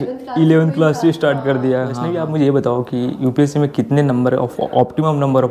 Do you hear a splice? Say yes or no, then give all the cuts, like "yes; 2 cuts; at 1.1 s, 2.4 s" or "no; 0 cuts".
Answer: yes; 1 cut; at 2.0 s